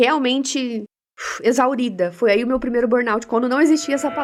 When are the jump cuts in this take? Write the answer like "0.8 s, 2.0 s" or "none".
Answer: none